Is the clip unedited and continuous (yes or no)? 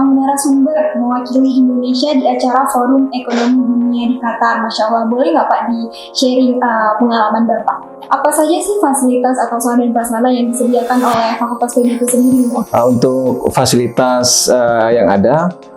no